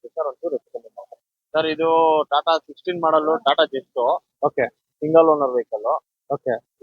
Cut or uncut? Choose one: cut